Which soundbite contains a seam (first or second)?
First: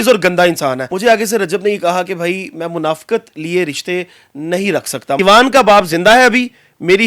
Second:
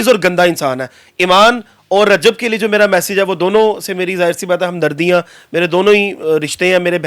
first